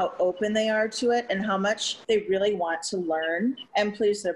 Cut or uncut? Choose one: uncut